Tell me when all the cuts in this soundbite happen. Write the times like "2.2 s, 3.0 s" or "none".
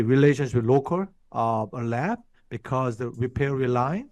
1.2 s